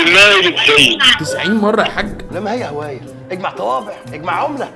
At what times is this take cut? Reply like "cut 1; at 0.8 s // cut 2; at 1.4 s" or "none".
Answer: none